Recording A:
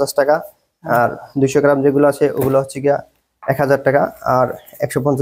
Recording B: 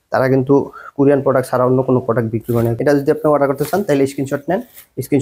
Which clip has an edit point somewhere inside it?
B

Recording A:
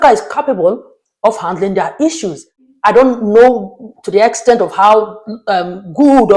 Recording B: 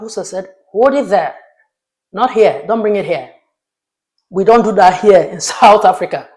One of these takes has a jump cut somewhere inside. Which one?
A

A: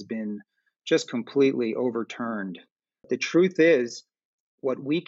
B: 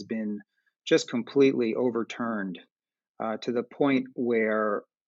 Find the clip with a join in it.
A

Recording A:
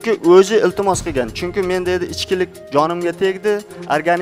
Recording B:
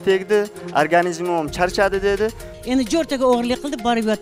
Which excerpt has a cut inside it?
B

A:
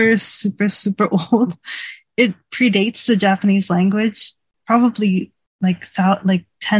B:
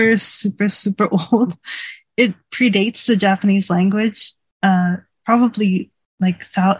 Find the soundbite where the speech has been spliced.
A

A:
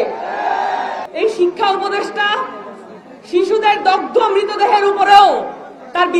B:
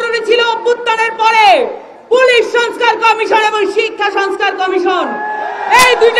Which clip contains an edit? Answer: A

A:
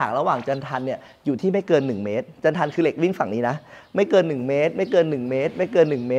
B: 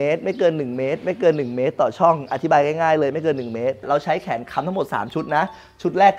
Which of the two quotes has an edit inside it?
B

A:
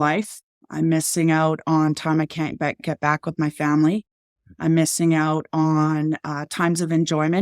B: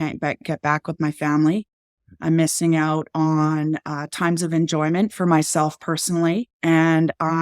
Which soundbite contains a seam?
B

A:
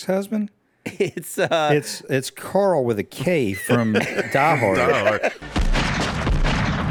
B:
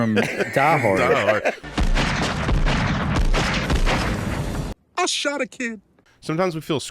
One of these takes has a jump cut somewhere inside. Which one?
B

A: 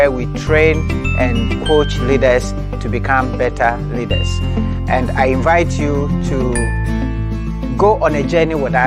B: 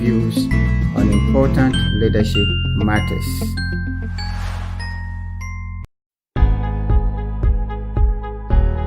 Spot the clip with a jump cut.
B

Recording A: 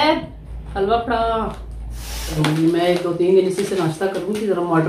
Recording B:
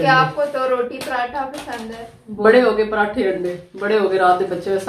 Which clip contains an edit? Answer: A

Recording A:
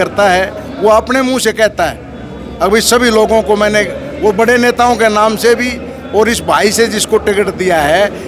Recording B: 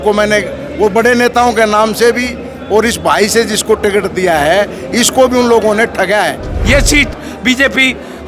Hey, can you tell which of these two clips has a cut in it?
B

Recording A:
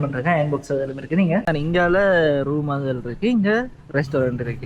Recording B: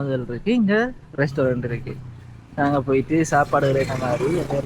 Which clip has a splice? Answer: A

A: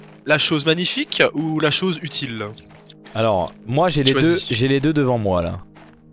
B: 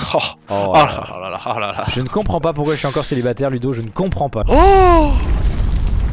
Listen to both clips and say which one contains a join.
B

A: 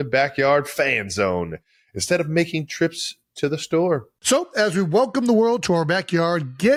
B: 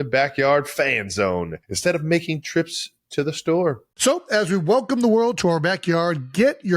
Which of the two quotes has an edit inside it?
B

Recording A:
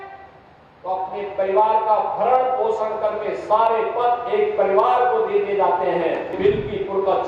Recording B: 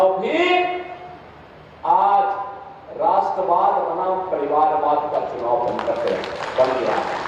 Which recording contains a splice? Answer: A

